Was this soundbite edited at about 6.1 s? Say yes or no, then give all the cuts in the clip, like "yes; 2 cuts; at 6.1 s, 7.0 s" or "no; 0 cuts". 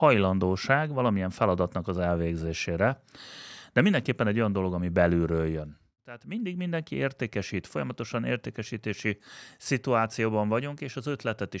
yes; 1 cut; at 6.1 s